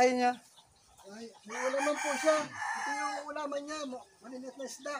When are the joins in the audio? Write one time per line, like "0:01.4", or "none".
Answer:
none